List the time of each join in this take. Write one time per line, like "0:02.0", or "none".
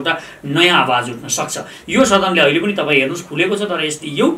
0:01.7